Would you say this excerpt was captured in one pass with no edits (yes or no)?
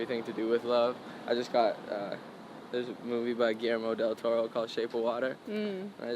yes